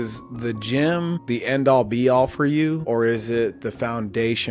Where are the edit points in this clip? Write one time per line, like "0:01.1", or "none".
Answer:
none